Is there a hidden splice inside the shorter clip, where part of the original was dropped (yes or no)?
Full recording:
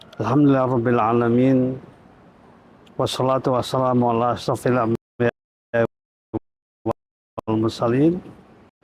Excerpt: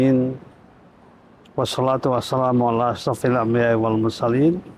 yes